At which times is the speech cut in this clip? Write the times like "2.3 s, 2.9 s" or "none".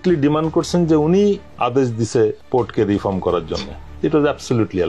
none